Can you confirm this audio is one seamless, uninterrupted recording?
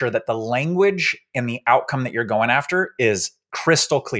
yes; 0 cuts

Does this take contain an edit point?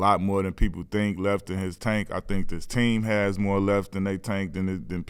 yes; 1 cut; at 1.8 s

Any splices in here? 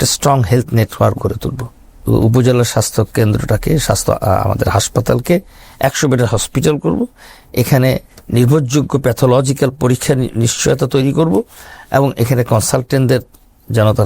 yes; 1 cut; at 2.0 s

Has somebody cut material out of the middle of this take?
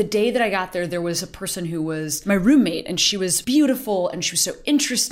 yes; 2 cuts; at 2.1 s, 3.4 s

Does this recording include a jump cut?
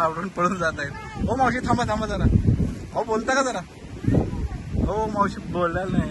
no; 0 cuts

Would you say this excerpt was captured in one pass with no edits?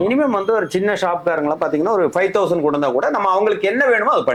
yes; 0 cuts

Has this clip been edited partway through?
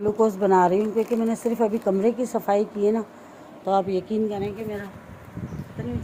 no; 0 cuts

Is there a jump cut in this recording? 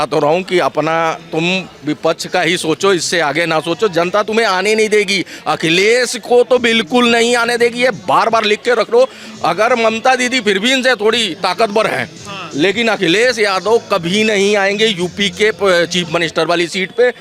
no; 0 cuts

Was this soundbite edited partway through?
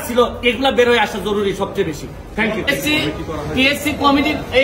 no; 0 cuts

